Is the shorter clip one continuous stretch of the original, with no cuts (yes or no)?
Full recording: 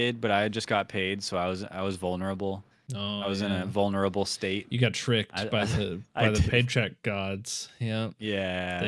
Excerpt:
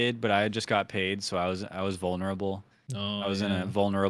yes